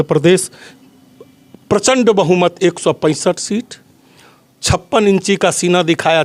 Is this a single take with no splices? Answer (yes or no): yes